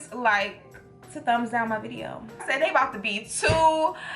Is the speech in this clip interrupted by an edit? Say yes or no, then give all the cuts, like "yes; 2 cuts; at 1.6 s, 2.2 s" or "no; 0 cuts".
yes; 1 cut; at 2.4 s